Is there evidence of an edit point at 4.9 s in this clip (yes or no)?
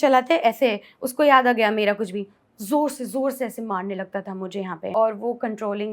yes